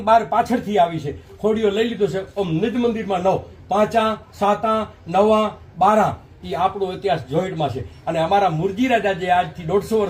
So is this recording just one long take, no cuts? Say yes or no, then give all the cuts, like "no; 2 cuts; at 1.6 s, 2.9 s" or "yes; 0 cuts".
yes; 0 cuts